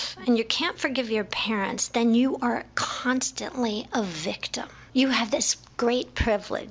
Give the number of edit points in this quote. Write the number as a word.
one